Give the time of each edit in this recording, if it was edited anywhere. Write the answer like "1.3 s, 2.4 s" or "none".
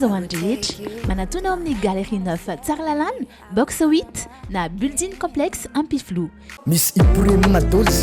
6.5 s